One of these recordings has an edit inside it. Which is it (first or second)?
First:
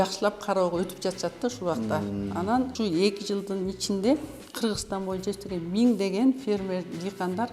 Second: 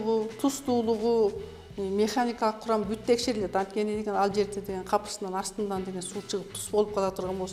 first